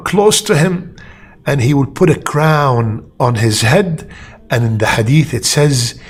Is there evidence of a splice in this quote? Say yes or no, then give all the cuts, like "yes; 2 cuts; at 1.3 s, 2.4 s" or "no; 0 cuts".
no; 0 cuts